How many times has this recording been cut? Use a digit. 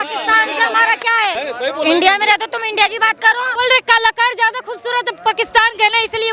2